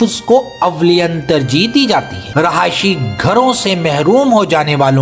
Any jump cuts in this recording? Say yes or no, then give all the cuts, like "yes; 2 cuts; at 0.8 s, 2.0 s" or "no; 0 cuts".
yes; 1 cut; at 2.2 s